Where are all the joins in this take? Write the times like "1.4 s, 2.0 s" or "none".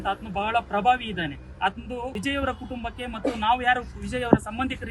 2.2 s